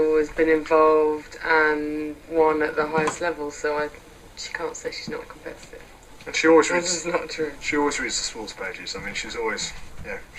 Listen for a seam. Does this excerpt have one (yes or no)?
yes